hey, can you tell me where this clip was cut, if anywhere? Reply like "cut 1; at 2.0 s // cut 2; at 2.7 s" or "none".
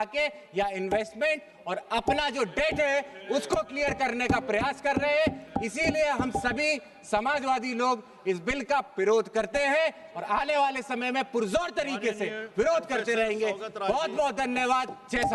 none